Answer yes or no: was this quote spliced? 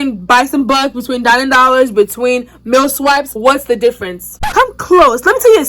yes